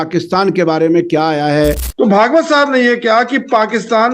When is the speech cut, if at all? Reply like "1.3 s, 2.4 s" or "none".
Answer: 1.8 s